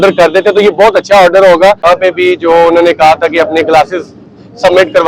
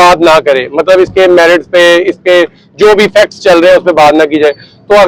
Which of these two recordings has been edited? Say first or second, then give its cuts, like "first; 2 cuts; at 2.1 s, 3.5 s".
first; 1 cut; at 1.8 s